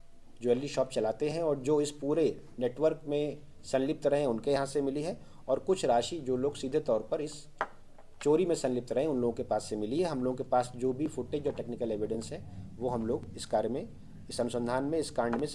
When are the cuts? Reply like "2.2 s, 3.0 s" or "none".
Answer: none